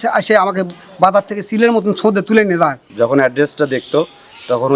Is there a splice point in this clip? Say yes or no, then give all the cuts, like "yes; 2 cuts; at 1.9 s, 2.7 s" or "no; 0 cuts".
yes; 1 cut; at 2.9 s